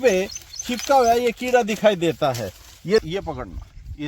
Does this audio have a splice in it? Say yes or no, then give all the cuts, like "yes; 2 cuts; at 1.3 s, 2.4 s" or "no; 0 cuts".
yes; 1 cut; at 3.0 s